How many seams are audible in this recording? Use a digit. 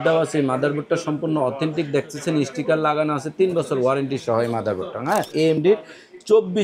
1